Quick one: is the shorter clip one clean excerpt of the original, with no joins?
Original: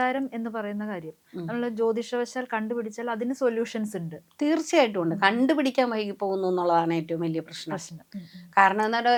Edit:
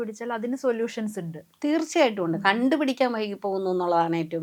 yes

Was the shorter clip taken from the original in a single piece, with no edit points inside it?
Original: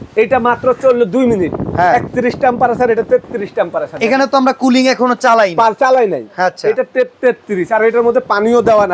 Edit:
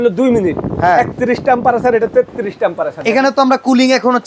yes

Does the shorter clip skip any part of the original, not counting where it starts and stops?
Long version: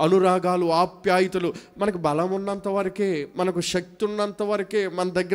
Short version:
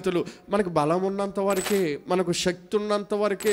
no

